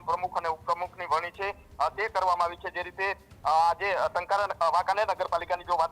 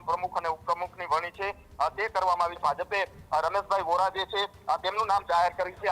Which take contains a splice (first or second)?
second